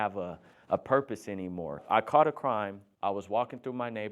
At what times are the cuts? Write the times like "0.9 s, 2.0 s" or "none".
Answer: 1.8 s, 2.8 s